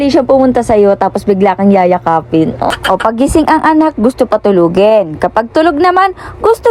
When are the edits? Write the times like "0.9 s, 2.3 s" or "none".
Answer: 2.7 s

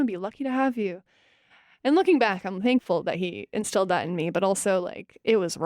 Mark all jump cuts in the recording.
2.8 s

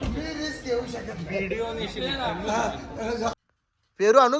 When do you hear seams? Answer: 3.3 s

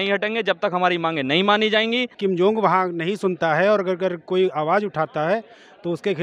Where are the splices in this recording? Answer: 2.2 s

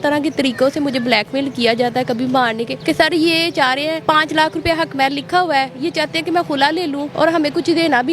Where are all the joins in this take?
2.7 s, 4.0 s, 7.1 s

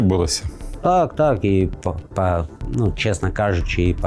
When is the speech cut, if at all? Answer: none

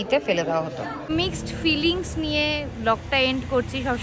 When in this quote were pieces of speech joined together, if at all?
1.1 s

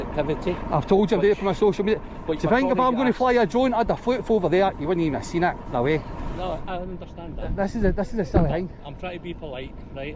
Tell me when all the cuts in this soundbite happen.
none

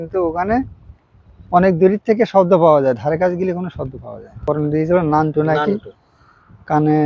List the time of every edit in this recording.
4.4 s

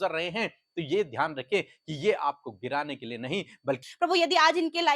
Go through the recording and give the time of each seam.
3.8 s

